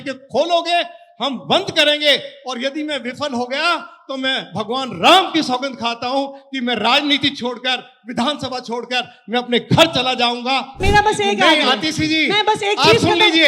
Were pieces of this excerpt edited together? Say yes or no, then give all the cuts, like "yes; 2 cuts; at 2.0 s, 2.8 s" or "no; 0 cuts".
yes; 1 cut; at 10.8 s